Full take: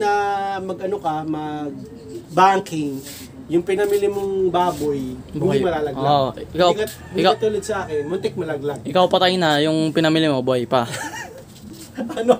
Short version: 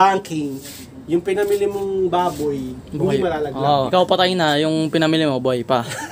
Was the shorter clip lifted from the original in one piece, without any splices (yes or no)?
no